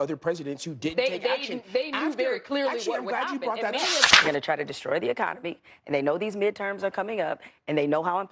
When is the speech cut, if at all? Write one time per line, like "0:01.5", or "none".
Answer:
0:04.1